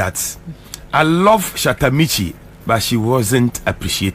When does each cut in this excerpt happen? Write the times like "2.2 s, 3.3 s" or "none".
none